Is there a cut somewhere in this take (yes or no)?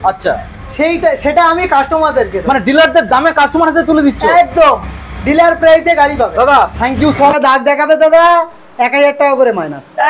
yes